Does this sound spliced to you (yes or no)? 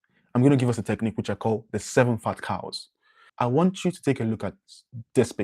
yes